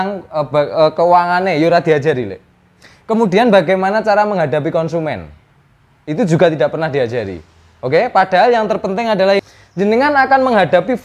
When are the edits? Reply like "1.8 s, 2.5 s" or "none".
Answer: 9.4 s